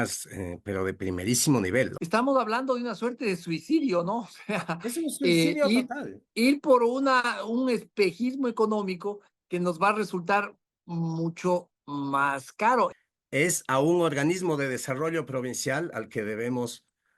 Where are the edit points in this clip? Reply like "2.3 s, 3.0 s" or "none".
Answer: 2.0 s, 13.0 s